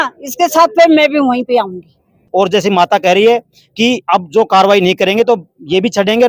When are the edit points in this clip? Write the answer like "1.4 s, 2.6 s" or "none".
2.2 s